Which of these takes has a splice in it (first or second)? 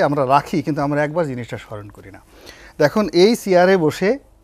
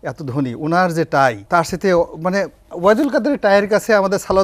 second